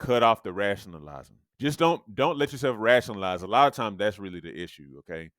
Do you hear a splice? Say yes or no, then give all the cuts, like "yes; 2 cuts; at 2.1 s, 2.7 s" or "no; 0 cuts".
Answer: yes; 1 cut; at 1.4 s